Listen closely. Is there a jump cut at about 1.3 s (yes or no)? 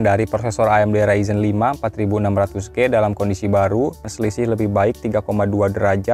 no